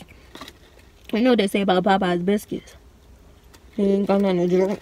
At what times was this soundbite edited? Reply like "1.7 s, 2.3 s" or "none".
none